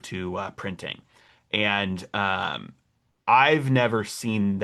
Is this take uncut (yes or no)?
yes